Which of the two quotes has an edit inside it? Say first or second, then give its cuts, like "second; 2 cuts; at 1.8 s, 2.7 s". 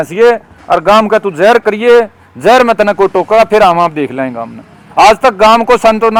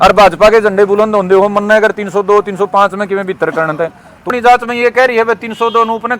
second; 1 cut; at 4.3 s